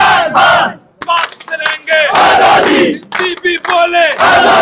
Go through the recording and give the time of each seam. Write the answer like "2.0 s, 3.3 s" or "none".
1.0 s